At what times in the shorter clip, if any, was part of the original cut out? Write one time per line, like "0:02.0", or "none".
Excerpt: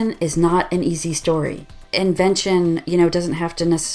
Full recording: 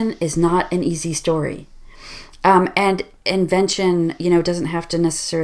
0:01.8